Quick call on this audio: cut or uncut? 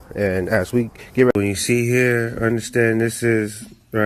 cut